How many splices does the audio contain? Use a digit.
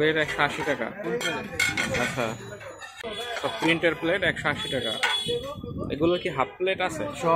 1